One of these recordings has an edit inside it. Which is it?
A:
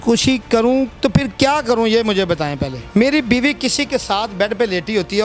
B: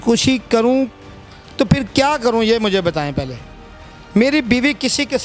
A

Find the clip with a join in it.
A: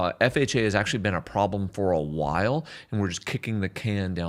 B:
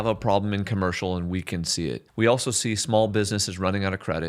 B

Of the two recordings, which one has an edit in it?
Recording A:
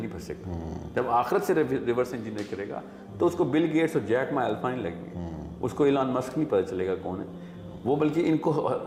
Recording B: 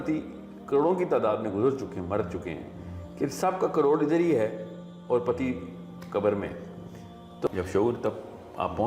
B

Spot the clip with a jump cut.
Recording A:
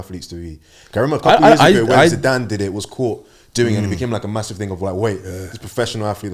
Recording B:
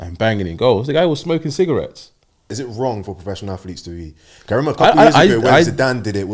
B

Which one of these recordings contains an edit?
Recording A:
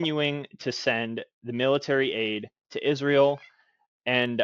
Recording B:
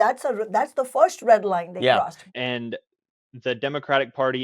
B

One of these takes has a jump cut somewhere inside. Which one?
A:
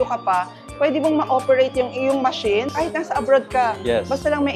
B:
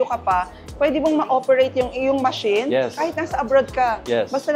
A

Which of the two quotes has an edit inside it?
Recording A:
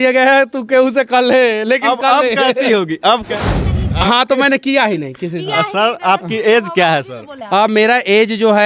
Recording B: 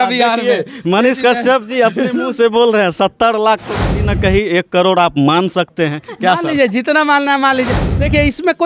A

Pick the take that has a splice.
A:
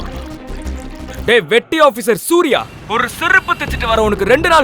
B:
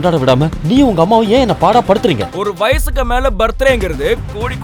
A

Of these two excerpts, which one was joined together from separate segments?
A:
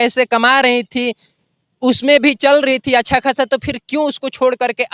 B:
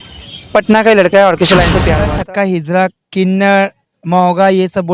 B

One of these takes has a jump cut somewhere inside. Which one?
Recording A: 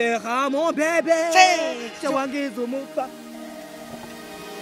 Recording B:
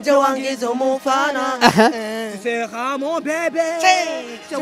A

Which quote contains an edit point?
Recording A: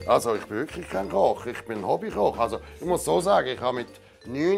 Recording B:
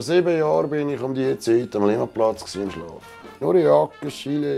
B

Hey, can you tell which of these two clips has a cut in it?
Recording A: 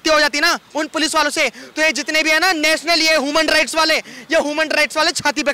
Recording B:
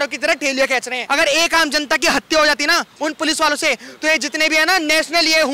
B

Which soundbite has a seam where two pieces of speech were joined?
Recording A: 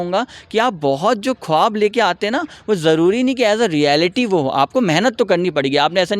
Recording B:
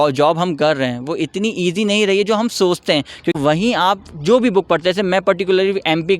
B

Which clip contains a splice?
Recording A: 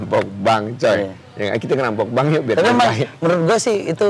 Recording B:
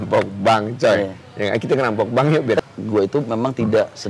B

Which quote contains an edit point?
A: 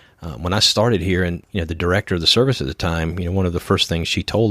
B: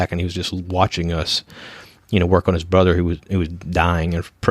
A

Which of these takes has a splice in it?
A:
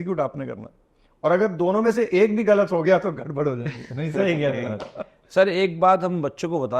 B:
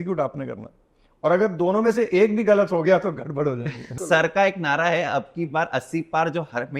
B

